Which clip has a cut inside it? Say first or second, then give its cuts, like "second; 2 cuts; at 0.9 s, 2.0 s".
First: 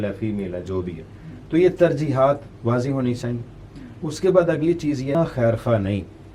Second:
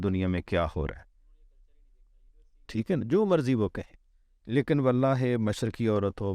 first; 1 cut; at 5.1 s